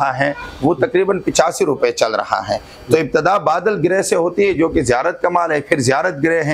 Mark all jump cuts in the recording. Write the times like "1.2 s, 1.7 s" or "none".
none

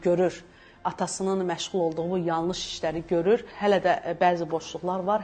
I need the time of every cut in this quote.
3.5 s

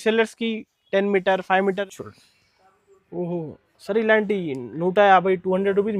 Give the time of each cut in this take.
1.9 s

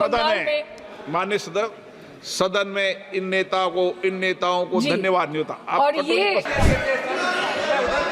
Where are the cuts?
6.5 s

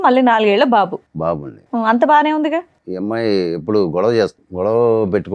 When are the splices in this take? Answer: 2.8 s, 4.4 s

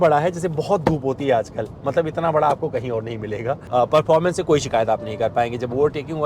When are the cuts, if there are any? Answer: 3.6 s

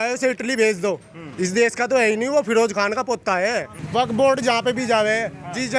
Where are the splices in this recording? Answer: 3.8 s

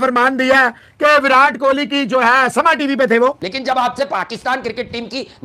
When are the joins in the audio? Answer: 3.5 s

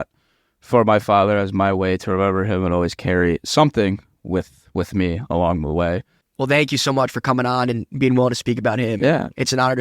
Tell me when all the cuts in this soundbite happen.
6.2 s

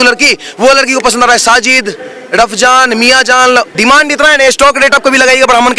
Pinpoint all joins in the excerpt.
3.7 s

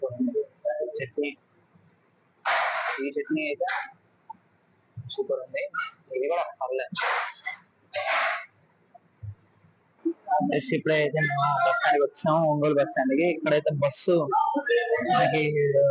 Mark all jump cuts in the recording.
10.0 s

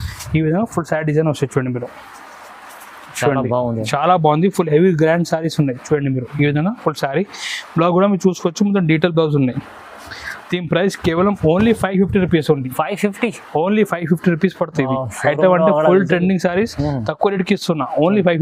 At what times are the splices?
none

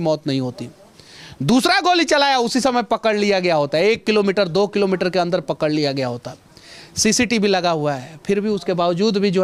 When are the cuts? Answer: none

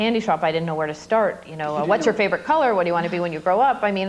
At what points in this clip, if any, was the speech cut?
none

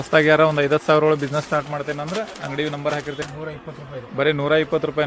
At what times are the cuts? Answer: 3.3 s

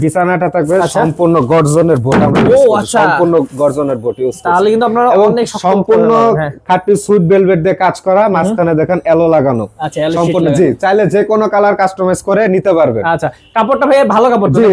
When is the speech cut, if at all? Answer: none

